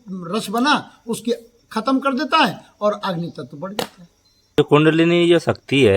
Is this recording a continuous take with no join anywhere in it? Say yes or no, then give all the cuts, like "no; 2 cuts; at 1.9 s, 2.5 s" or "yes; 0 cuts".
no; 1 cut; at 4.6 s